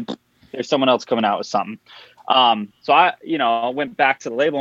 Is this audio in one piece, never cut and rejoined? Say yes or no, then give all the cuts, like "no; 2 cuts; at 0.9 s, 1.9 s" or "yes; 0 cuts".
yes; 0 cuts